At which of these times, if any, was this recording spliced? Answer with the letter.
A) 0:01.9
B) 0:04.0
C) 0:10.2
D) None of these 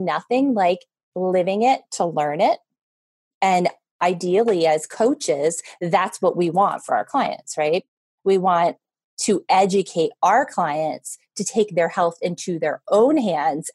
B